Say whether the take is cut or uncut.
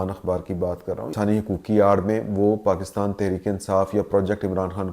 cut